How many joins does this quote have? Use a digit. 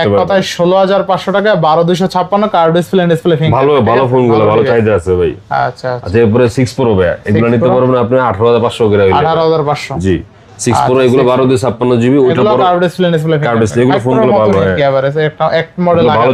0